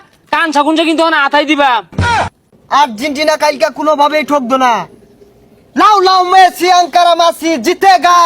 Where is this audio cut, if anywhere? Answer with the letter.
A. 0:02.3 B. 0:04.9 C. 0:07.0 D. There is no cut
A